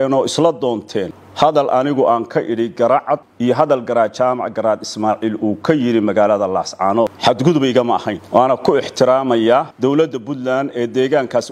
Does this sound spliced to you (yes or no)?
yes